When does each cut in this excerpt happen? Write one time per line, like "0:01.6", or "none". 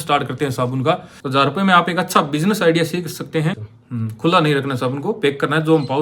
0:01.1
0:03.7